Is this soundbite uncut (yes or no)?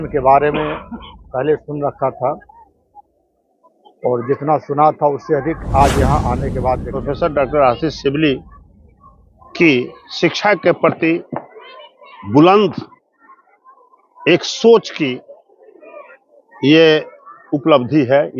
no